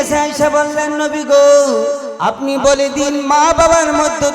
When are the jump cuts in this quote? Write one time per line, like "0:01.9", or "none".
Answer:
0:02.1